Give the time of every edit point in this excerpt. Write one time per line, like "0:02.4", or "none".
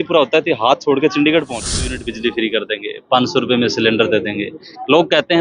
0:02.0